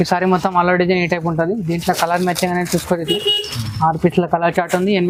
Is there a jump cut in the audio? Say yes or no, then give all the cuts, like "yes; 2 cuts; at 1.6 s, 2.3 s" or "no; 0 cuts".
no; 0 cuts